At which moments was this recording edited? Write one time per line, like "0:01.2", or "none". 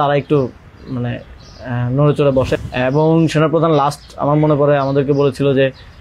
0:02.6